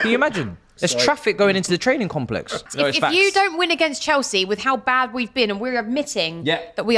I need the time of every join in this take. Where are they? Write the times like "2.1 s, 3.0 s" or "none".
2.7 s